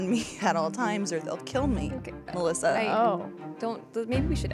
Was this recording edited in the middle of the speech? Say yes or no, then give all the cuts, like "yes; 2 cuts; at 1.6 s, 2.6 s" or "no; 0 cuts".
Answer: no; 0 cuts